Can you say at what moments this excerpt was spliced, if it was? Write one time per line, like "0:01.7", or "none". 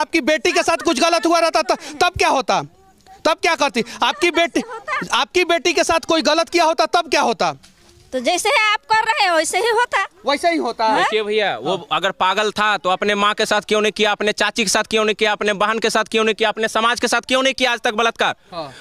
none